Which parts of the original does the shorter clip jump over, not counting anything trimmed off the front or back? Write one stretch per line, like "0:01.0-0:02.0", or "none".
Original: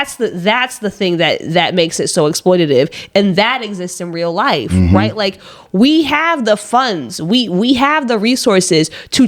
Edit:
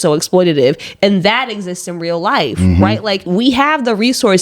0:05.4-0:07.5